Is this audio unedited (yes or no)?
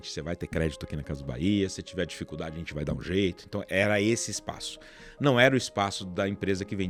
yes